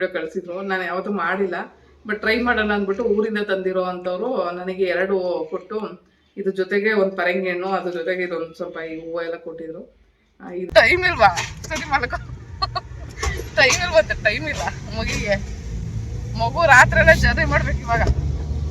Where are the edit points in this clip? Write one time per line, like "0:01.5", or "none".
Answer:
0:10.7